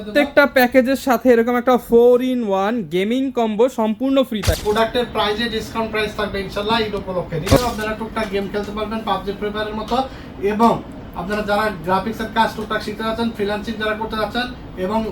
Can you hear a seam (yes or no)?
yes